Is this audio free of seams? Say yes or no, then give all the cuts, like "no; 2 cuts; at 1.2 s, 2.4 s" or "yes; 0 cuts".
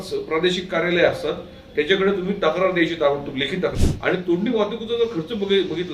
no; 1 cut; at 3.8 s